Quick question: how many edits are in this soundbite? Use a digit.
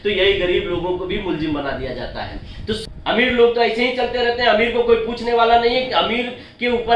1